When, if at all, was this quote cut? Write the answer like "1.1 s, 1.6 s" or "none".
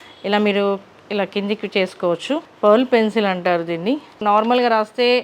2.5 s, 4.2 s